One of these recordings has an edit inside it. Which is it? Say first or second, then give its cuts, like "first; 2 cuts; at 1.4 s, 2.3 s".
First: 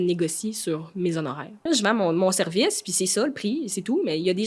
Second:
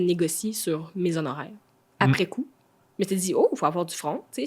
first; 1 cut; at 1.7 s